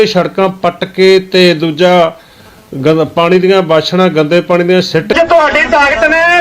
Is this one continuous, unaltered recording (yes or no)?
no